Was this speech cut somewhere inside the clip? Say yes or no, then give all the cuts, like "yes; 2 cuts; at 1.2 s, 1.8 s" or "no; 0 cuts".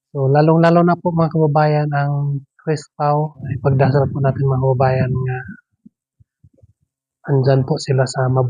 yes; 1 cut; at 3.4 s